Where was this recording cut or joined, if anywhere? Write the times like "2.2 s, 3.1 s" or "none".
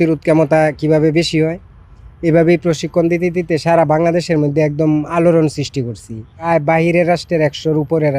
6.5 s